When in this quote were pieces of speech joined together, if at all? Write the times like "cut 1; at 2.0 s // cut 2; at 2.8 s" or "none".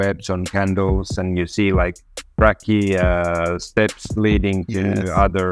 none